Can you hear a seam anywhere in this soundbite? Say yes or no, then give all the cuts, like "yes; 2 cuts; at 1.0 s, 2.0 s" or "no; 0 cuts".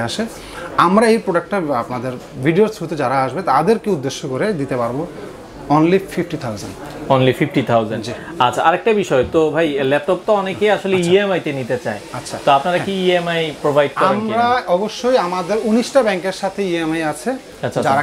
no; 0 cuts